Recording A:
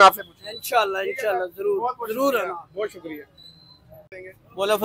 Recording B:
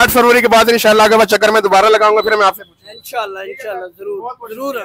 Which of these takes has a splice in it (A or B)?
A